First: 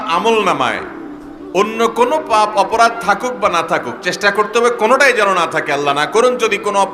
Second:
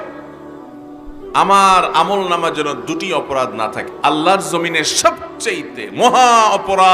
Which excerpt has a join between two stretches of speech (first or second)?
second